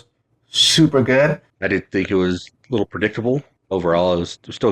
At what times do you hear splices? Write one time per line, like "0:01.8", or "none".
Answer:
0:01.5
0:03.5